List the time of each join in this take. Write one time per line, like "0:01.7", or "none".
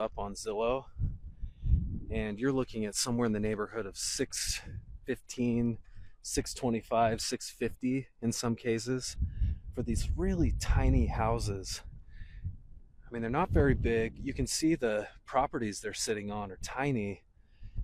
none